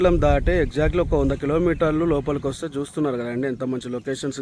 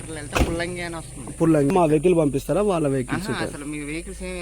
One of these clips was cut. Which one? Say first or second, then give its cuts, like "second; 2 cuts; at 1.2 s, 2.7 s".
second; 1 cut; at 1.7 s